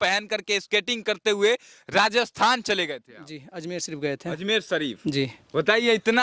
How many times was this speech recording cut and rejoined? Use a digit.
0